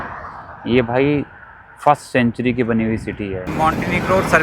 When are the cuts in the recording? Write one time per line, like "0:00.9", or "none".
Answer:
0:03.4

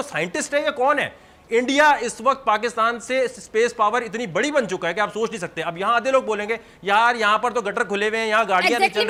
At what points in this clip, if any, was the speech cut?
none

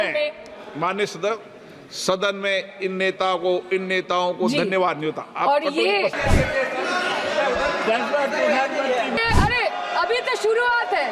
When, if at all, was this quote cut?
0:06.2
0:09.2

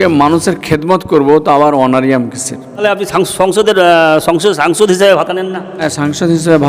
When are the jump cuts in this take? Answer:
0:02.8
0:05.8

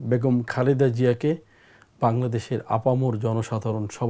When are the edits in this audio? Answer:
none

